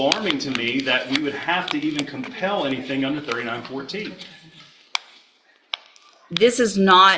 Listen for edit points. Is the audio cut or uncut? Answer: uncut